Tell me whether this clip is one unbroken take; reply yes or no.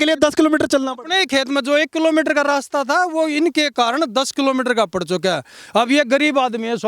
yes